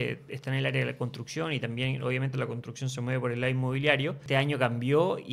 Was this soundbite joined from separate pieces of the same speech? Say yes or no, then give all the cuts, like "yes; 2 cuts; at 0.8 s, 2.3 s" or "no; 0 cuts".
yes; 1 cut; at 4.2 s